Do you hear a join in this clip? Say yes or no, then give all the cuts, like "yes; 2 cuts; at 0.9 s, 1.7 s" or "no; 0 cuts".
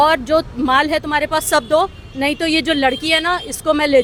no; 0 cuts